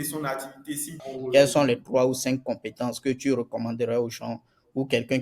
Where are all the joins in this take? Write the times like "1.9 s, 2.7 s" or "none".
0.9 s